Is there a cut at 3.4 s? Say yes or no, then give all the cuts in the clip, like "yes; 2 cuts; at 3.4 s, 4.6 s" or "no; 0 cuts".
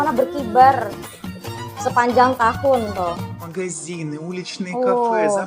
yes; 1 cut; at 3.4 s